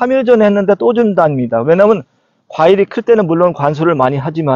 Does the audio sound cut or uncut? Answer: uncut